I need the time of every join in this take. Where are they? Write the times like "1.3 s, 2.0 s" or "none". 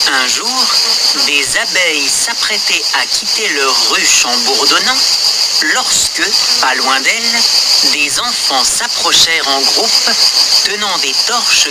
none